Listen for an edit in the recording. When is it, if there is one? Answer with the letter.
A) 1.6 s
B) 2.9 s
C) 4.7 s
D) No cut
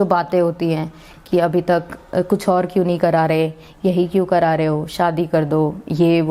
D